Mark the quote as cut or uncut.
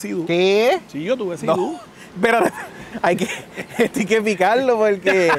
uncut